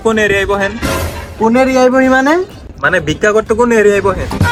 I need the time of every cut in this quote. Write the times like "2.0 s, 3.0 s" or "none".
none